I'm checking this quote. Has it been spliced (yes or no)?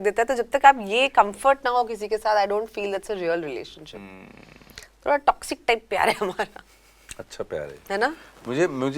no